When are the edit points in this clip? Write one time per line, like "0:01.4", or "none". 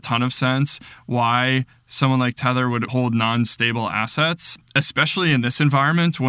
0:02.9
0:04.6